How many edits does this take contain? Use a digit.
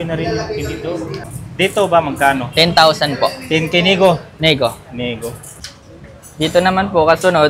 2